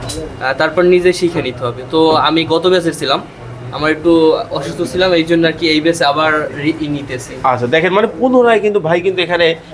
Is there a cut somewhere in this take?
no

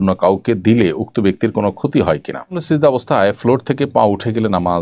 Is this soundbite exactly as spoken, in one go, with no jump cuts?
no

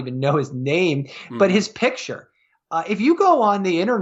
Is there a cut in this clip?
no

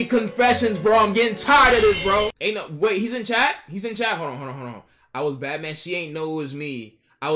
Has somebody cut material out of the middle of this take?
yes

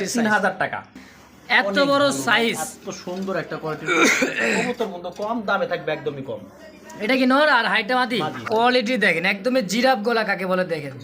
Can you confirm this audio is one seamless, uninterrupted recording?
no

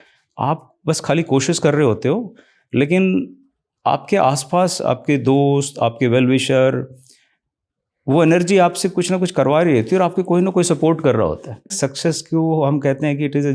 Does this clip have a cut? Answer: yes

